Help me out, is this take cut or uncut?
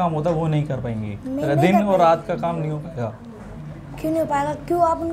uncut